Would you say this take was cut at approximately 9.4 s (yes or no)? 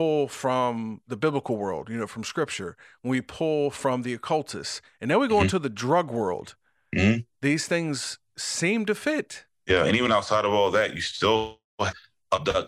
yes